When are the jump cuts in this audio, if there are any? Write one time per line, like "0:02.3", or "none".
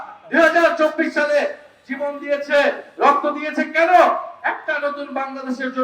none